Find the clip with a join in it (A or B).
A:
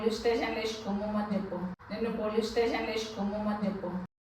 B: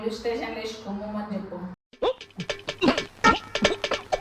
B